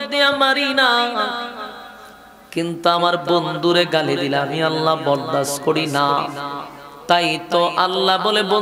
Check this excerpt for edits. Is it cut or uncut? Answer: uncut